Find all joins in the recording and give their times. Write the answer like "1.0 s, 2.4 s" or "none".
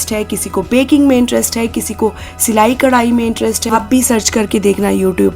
3.6 s